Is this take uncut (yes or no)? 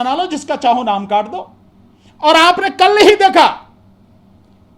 yes